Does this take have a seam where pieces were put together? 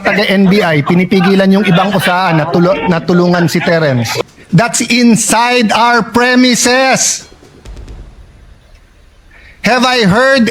yes; 1 cut; at 4.2 s

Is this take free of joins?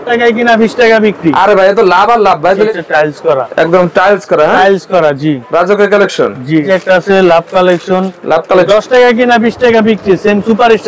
no; 3 cuts; at 2.7 s, 6.7 s, 8.7 s

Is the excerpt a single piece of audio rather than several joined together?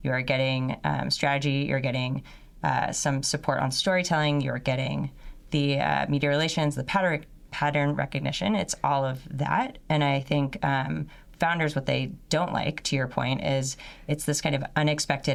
yes; 0 cuts

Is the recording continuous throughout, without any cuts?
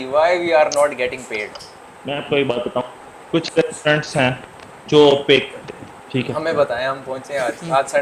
yes; 0 cuts

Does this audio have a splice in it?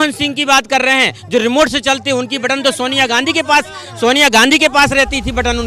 no; 0 cuts

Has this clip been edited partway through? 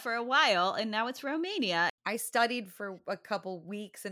yes; 1 cut; at 2.0 s

